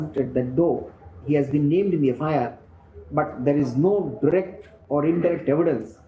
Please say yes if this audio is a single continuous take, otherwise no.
yes